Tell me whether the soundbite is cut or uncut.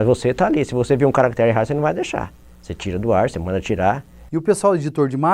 cut